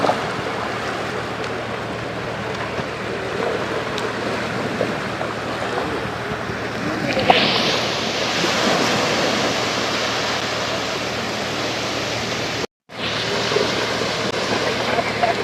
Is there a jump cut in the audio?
no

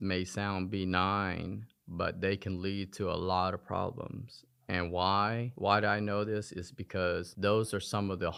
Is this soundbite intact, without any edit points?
yes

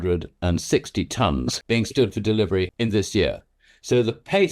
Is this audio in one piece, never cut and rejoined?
no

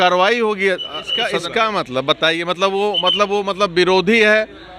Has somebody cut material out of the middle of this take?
yes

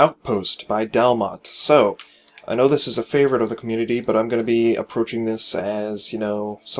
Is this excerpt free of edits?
no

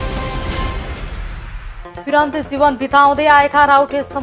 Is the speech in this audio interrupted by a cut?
yes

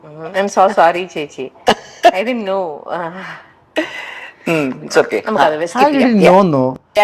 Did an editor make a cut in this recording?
no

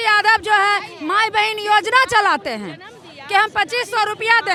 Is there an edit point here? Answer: no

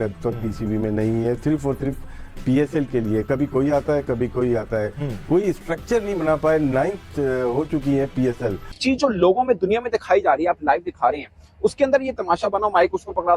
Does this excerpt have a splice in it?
yes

